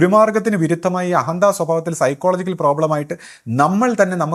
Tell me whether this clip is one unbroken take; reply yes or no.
yes